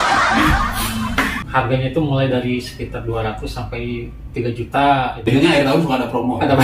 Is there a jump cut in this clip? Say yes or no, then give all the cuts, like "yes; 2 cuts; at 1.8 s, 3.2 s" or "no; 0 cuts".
yes; 2 cuts; at 1.4 s, 5.2 s